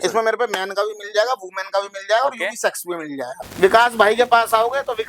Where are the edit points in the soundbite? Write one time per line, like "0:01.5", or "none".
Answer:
0:03.4

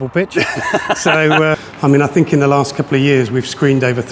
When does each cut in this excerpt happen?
0:01.5

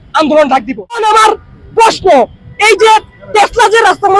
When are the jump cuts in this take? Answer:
0:01.0

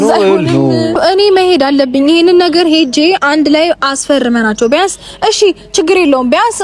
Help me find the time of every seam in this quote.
0:01.0

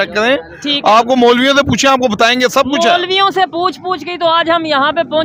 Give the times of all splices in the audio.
none

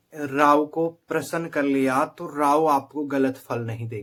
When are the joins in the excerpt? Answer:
none

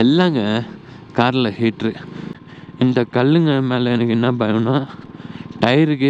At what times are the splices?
0:02.1

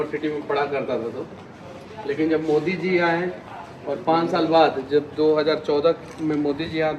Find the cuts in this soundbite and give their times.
none

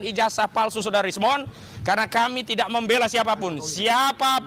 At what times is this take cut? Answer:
none

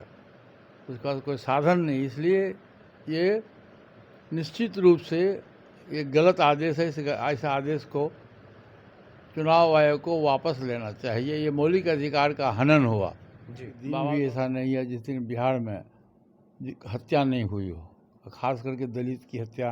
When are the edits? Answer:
0:13.8

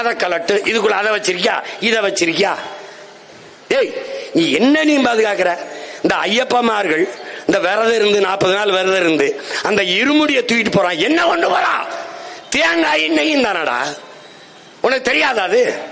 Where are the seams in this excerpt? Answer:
none

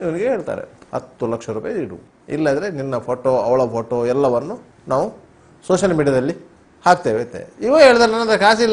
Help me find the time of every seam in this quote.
none

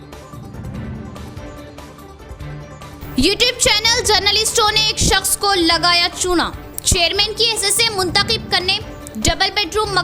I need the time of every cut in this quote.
0:01.2
0:02.5

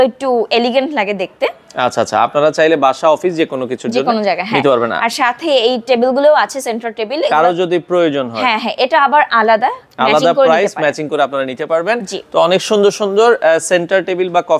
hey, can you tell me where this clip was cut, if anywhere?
none

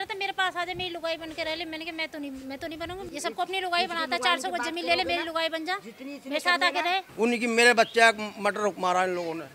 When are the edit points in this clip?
0:03.1
0:07.1

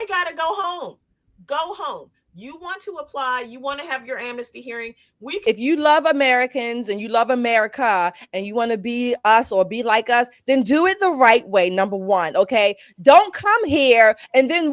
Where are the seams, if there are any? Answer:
0:05.4

